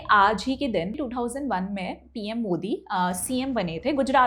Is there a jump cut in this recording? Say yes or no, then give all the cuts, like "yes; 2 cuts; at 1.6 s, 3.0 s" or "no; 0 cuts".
yes; 1 cut; at 0.9 s